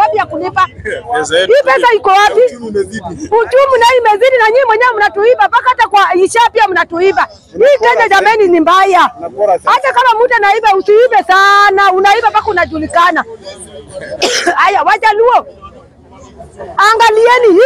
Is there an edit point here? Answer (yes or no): no